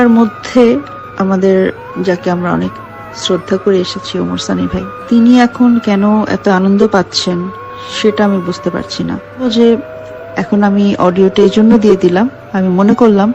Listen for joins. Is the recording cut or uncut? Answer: cut